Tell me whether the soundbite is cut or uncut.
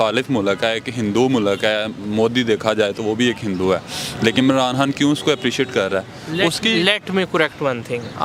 uncut